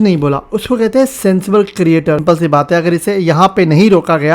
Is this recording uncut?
no; 1 cut; at 2.2 s

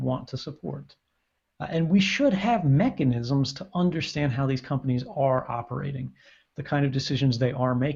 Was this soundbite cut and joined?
no; 0 cuts

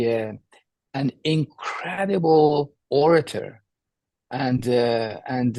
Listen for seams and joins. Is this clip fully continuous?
yes; 0 cuts

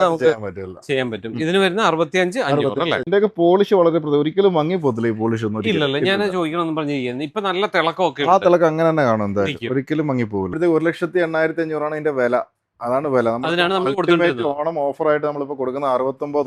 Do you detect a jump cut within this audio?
yes; 2 cuts; at 3.0 s, 10.5 s

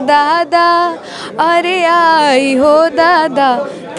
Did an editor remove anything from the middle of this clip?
no; 0 cuts

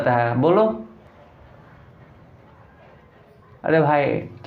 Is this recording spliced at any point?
no; 0 cuts

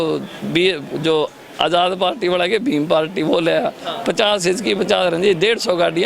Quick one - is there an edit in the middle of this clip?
no; 0 cuts

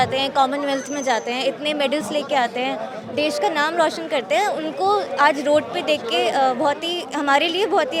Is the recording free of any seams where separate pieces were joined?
yes; 0 cuts

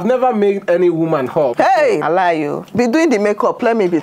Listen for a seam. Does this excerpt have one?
yes; 1 cut; at 2.6 s

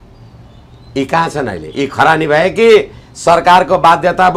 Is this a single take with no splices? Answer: yes; 0 cuts

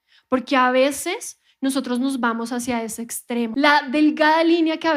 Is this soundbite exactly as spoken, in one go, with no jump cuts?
no; 1 cut; at 3.5 s

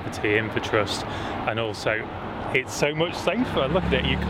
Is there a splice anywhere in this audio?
no; 0 cuts

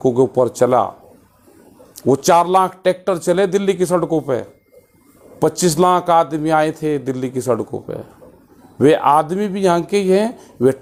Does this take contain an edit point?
no; 0 cuts

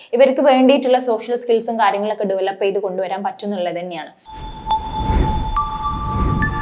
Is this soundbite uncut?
no; 1 cut; at 4.3 s

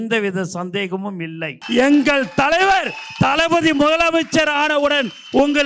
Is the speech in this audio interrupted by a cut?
yes; 1 cut; at 1.6 s

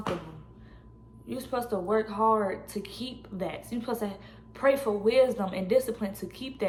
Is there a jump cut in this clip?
no; 0 cuts

